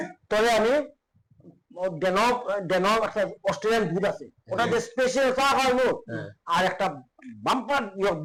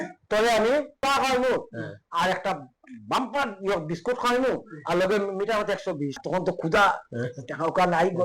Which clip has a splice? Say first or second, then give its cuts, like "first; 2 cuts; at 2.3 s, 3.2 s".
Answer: second; 2 cuts; at 1.0 s, 6.2 s